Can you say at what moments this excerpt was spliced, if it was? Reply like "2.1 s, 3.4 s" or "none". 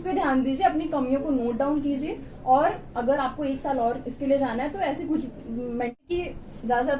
5.9 s